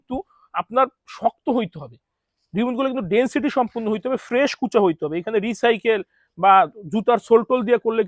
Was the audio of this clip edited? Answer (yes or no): no